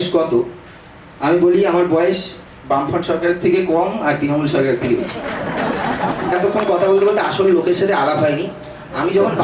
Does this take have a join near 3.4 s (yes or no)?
no